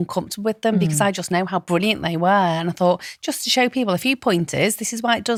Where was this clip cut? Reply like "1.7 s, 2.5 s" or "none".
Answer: none